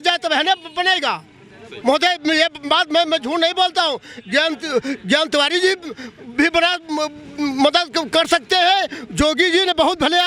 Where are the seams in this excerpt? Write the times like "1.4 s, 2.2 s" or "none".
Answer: none